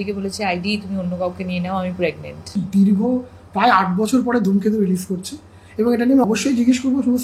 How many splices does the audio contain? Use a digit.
2